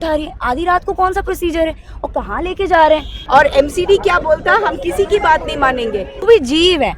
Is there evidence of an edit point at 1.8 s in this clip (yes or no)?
no